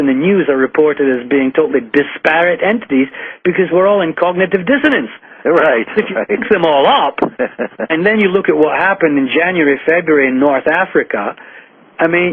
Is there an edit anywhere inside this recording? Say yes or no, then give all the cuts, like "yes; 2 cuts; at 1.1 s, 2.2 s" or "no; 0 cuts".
yes; 1 cut; at 4.6 s